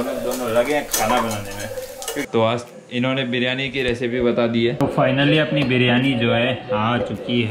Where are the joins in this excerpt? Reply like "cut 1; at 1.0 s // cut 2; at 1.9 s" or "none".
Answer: cut 1; at 2.2 s // cut 2; at 4.8 s